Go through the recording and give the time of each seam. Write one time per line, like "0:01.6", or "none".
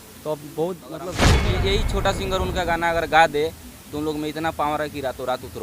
0:01.4